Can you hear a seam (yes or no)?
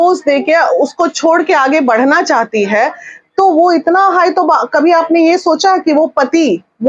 no